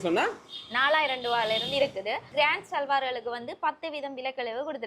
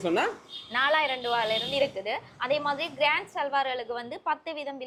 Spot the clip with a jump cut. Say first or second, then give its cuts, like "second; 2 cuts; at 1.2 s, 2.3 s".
first; 1 cut; at 2.3 s